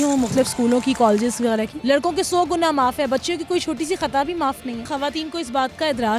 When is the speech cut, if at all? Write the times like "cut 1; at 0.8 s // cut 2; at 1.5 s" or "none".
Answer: cut 1; at 1.7 s // cut 2; at 4.9 s